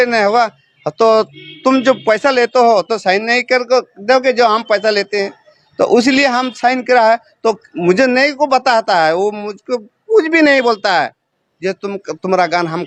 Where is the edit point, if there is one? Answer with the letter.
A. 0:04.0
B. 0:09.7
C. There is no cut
C